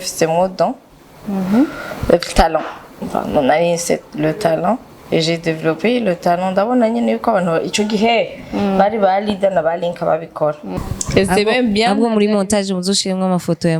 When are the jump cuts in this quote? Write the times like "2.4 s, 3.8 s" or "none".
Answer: 10.7 s